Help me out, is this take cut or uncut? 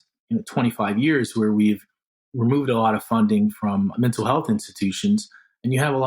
cut